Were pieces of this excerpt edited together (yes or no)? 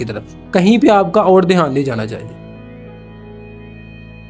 yes